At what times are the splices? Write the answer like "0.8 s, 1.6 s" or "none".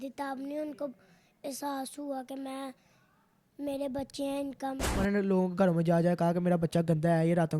5.0 s